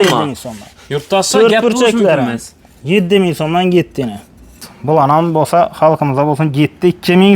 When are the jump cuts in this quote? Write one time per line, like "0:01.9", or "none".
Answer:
0:04.6